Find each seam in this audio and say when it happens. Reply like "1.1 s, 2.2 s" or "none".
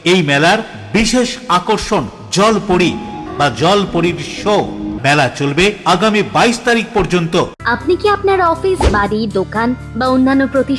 3.2 s, 4.9 s, 7.6 s

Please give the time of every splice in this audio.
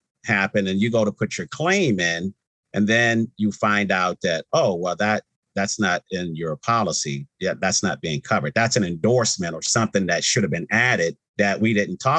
11.2 s

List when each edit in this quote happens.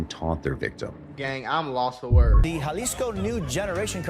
2.4 s

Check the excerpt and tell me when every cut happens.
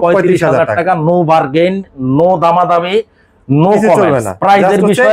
none

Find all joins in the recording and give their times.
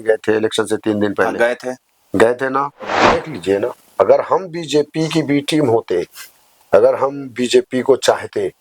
3.1 s

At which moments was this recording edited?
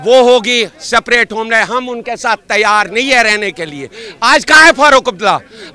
none

